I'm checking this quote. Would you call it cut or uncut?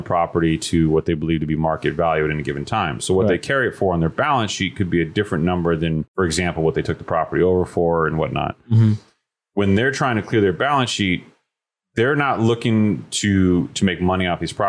cut